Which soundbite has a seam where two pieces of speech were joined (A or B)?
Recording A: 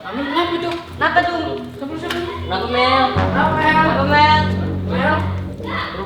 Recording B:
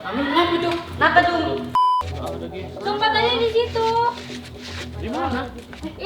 B